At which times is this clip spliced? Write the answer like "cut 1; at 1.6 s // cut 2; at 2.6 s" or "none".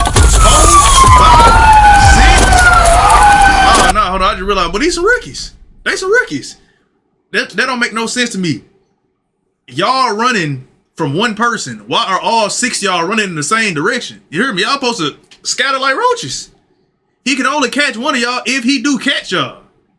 none